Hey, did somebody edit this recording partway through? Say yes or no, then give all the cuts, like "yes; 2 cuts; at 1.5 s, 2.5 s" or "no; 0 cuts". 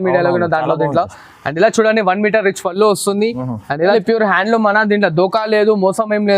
yes; 1 cut; at 3.9 s